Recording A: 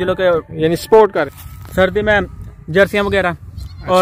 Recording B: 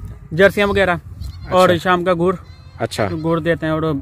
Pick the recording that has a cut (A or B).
A